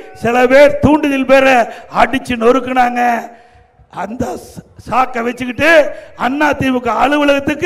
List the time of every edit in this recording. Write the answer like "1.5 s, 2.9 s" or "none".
none